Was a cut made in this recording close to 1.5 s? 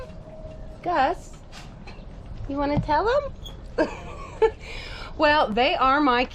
no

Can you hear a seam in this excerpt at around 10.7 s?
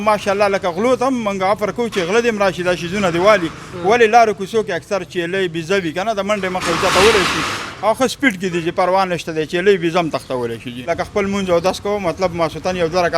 yes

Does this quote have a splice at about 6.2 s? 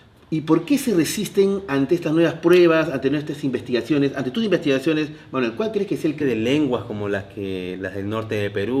no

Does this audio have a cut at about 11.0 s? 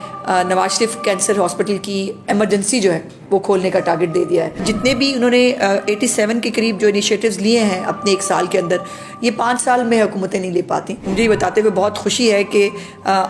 yes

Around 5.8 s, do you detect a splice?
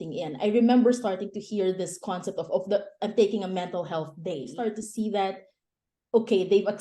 no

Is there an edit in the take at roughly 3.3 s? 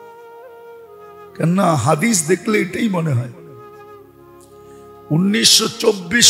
yes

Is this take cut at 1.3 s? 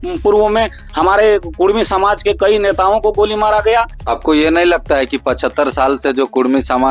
no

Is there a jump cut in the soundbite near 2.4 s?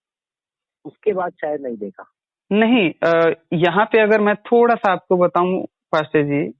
no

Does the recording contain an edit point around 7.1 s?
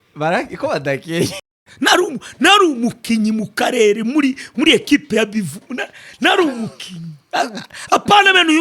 no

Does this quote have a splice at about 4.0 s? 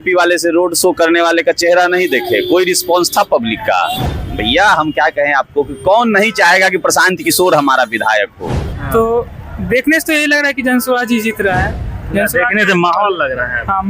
yes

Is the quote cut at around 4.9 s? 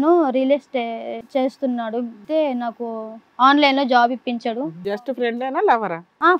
yes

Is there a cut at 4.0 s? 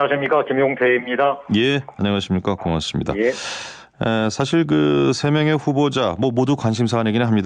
no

